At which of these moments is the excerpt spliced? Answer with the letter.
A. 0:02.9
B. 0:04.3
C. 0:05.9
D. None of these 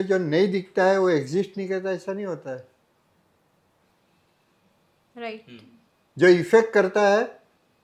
D